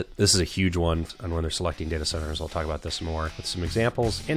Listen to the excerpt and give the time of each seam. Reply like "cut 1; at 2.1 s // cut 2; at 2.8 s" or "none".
cut 1; at 1.1 s